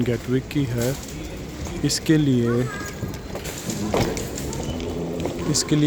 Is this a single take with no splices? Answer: yes; 0 cuts

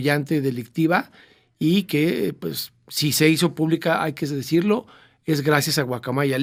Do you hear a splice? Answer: no; 0 cuts

